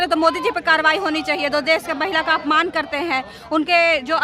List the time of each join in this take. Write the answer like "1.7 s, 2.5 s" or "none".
none